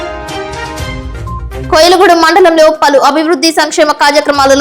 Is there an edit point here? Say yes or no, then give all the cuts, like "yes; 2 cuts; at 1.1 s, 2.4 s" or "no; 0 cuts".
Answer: yes; 1 cut; at 1.6 s